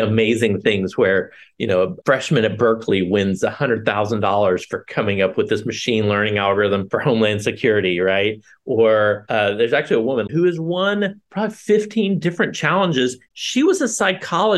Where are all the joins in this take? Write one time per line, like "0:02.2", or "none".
0:10.3
0:13.3